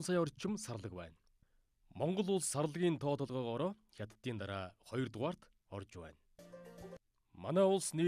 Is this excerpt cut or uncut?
cut